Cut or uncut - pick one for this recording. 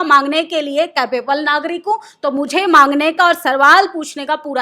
uncut